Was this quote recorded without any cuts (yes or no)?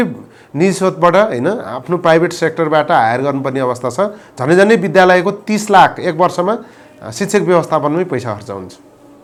yes